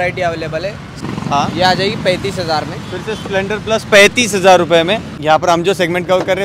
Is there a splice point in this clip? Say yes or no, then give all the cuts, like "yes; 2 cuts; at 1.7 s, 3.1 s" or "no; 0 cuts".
yes; 2 cuts; at 1.0 s, 5.1 s